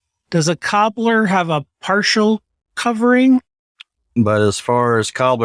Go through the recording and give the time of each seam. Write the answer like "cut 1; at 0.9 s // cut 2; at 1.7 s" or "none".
cut 1; at 4.0 s

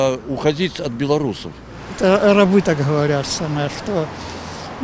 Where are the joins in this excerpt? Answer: cut 1; at 1.8 s

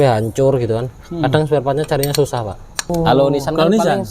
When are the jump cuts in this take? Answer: cut 1; at 2.9 s

